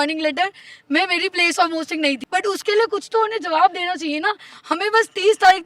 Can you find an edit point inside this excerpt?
yes; 1 cut; at 2.2 s

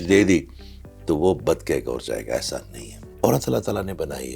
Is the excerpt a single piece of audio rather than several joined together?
yes; 0 cuts

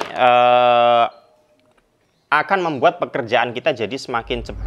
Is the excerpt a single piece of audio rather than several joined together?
yes; 0 cuts

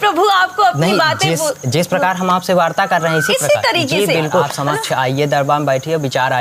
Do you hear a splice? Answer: yes; 1 cut; at 4.6 s

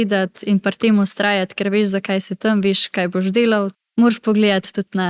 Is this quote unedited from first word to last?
no; 1 cut; at 3.8 s

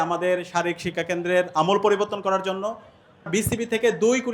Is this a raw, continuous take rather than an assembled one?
no; 1 cut; at 3.3 s

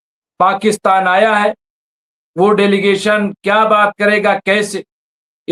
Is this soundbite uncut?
yes; 0 cuts

